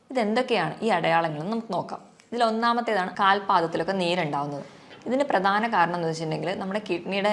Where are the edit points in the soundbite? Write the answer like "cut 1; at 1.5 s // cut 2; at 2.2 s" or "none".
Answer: cut 1; at 3.1 s

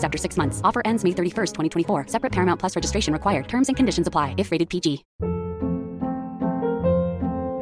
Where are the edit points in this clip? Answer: cut 1; at 5.1 s

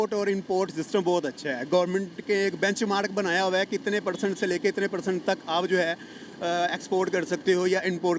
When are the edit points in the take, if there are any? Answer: none

